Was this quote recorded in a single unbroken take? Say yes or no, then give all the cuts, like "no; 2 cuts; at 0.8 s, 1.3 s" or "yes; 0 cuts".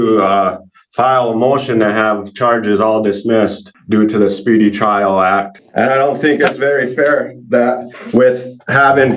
no; 2 cuts; at 3.7 s, 5.6 s